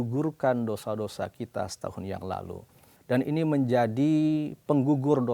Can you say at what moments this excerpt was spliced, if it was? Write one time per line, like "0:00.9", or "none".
0:02.9